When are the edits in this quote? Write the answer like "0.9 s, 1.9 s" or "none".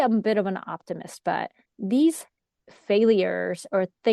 1.7 s